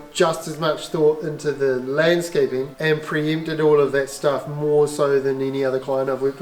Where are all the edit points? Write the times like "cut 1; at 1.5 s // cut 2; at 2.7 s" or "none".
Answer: cut 1; at 2.7 s